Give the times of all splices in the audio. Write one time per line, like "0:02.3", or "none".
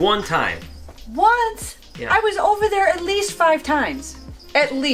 none